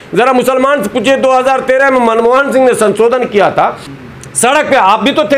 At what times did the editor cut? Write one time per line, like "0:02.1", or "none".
0:03.8